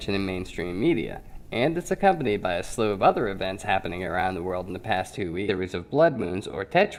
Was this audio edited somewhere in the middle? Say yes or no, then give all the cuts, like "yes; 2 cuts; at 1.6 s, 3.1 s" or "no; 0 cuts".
no; 0 cuts